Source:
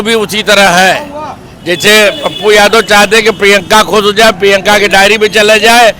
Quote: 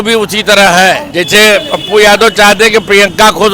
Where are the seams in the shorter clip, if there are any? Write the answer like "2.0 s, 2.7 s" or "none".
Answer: 1.1 s